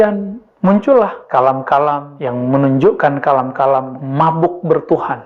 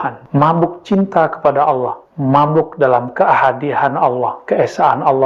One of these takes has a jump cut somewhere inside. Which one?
first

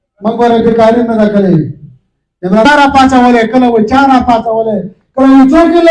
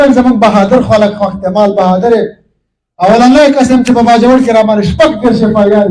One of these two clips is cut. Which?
first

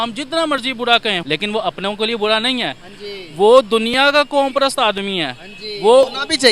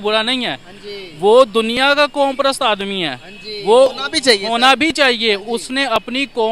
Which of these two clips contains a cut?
first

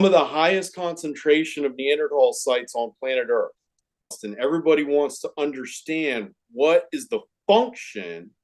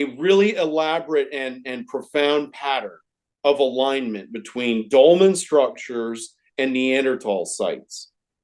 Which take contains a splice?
first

